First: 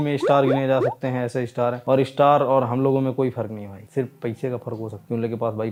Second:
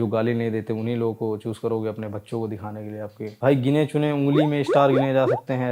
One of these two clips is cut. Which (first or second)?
second